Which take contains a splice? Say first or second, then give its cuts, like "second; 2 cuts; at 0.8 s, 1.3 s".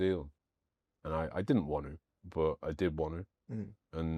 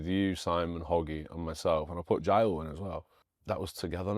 second; 1 cut; at 3.3 s